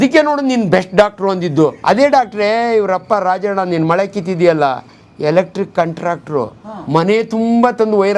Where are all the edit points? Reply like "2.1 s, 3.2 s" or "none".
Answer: 1.8 s